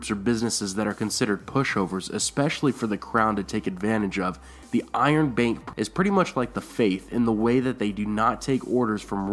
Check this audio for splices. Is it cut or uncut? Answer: cut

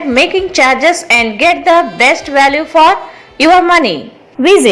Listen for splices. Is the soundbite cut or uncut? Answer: uncut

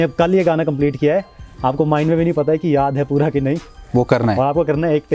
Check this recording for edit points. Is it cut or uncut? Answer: uncut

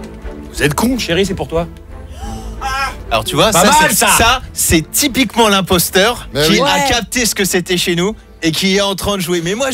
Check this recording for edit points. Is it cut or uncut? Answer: cut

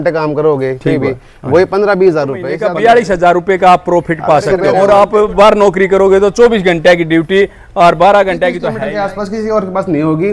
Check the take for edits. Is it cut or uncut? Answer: cut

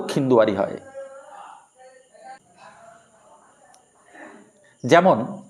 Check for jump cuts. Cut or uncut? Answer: uncut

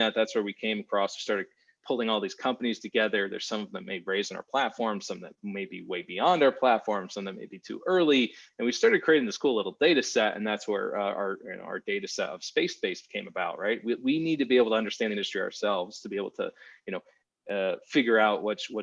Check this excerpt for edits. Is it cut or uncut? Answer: uncut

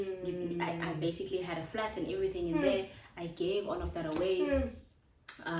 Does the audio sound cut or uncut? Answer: uncut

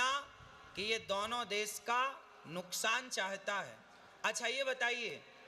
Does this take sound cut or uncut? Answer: uncut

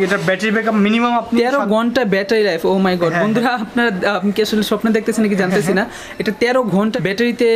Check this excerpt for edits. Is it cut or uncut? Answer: uncut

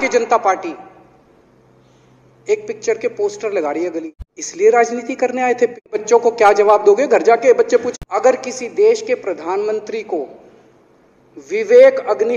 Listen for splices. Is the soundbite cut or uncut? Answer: cut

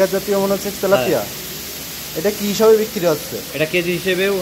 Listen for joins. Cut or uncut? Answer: uncut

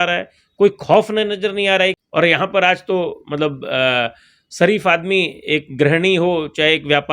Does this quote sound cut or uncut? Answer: cut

